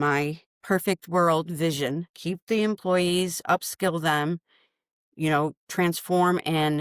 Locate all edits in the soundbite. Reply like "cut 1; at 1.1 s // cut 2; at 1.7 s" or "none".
none